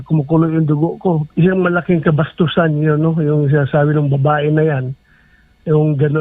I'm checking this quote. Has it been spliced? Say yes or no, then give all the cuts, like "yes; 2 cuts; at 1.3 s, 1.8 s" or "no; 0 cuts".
yes; 1 cut; at 1.2 s